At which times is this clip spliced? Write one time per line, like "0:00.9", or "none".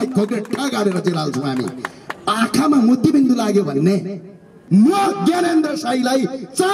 0:04.6